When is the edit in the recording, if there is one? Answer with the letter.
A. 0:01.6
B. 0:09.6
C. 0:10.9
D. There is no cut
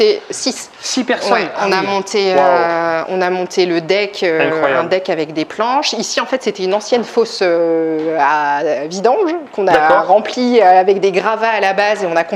D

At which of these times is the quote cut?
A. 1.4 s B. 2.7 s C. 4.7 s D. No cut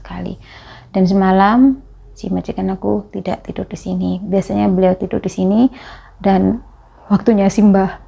D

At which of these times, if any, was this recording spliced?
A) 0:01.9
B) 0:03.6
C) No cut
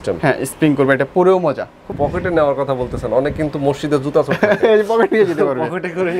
A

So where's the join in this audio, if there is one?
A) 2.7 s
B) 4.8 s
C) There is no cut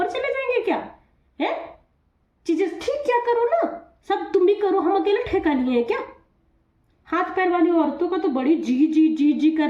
C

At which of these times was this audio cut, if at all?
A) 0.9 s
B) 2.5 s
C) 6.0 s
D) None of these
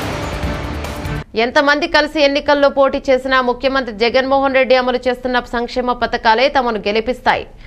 A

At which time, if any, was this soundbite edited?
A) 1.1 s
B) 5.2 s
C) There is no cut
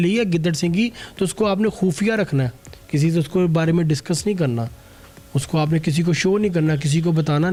C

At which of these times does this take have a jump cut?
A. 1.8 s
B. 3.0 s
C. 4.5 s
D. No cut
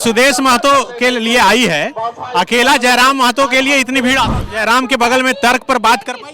C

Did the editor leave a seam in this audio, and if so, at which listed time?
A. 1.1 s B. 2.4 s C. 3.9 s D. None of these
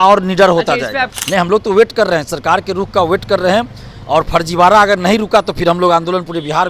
A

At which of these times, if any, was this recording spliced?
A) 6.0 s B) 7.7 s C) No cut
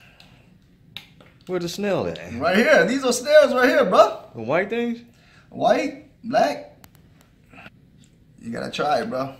B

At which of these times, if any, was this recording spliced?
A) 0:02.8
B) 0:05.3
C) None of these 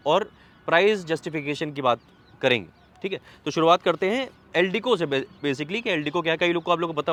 C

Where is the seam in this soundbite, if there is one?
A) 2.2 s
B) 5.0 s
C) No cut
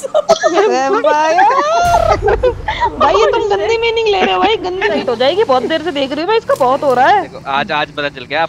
B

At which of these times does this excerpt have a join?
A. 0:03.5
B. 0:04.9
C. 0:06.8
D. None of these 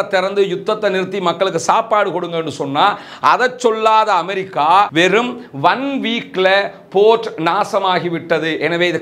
B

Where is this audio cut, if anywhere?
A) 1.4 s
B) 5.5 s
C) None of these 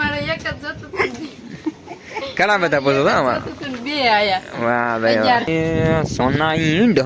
B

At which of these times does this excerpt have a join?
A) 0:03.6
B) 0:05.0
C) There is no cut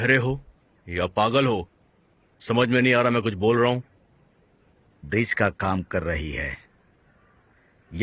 B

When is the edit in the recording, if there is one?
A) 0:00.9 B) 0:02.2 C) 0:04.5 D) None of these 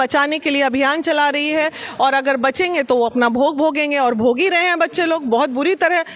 D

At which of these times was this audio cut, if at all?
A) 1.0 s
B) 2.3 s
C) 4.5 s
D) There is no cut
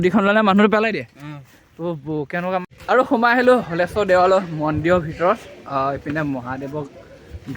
B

